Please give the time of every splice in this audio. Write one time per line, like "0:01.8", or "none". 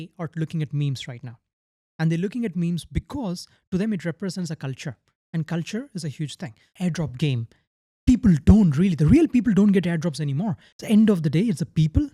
0:06.7
0:10.6